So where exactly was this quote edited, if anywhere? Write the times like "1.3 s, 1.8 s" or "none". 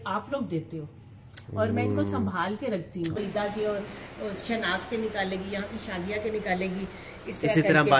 3.2 s